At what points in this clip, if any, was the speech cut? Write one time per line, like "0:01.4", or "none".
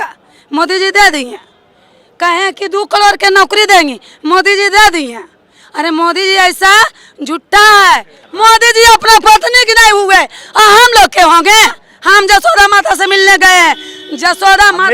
0:08.2
0:11.9